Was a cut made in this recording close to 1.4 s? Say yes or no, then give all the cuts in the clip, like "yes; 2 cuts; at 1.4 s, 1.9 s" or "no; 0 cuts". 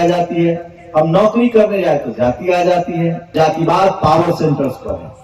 no; 1 cut; at 3.3 s